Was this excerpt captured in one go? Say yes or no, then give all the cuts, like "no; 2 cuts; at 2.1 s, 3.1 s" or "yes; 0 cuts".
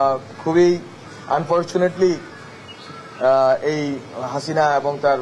yes; 0 cuts